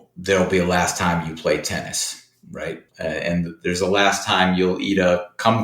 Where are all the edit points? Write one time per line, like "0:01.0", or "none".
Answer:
0:02.9

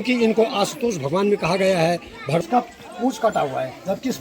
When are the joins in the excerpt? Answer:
0:02.4

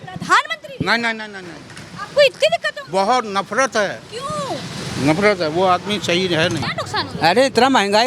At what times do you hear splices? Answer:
0:06.7

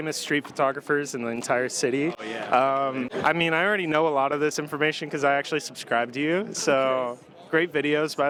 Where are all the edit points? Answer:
none

